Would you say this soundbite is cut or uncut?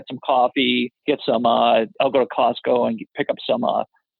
cut